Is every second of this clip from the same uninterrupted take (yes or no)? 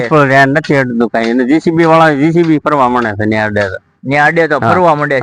yes